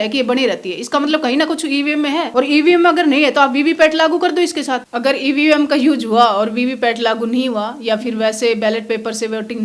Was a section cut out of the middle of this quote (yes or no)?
yes